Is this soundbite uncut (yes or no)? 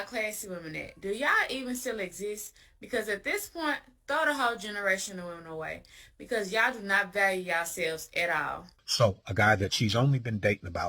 no